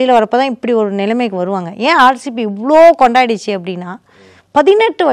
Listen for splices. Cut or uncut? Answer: uncut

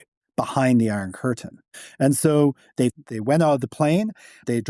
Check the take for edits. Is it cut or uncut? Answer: cut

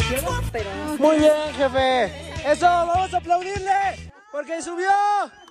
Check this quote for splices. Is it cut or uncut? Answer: uncut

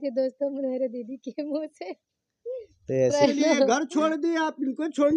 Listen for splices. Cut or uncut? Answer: cut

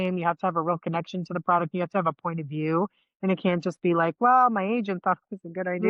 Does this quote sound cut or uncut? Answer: uncut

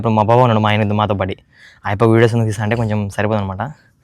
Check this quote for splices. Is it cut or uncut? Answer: uncut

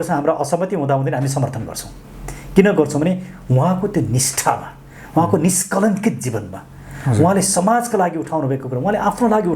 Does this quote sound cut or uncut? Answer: uncut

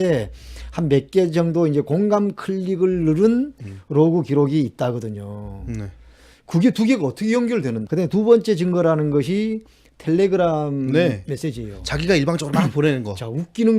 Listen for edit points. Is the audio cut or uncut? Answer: cut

